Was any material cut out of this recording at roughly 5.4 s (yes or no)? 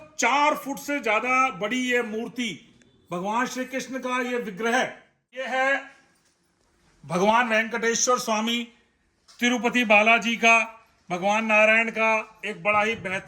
yes